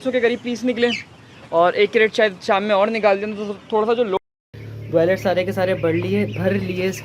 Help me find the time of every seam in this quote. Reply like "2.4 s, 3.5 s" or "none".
4.2 s